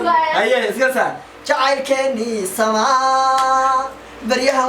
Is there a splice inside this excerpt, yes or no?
no